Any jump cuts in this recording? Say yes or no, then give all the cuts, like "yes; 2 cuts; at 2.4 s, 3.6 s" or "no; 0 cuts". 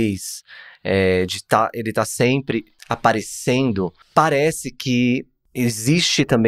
yes; 3 cuts; at 2.7 s, 4.0 s, 5.4 s